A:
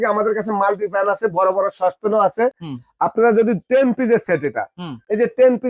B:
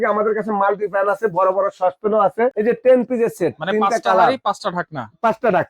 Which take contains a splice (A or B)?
B